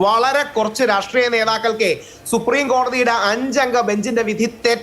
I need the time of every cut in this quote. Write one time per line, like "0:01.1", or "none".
none

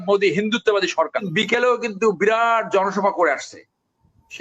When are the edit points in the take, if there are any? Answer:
0:01.3

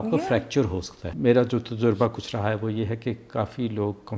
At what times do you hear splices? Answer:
0:01.0

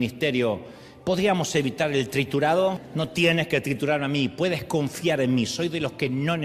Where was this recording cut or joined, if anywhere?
none

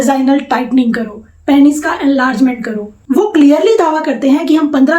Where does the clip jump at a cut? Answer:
0:02.9

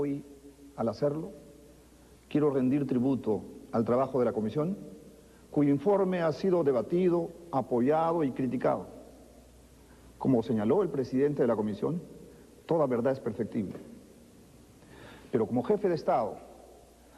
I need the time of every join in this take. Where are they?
0:15.5

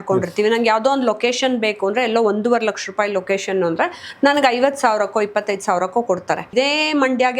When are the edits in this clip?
0:06.5

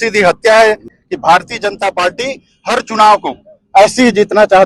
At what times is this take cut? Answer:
0:01.0

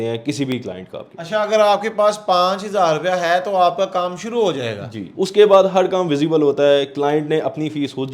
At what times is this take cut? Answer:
none

